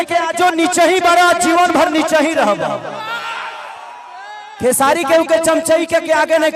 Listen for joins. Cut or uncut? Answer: uncut